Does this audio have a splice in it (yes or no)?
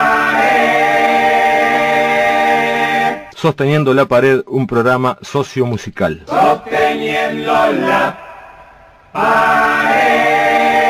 no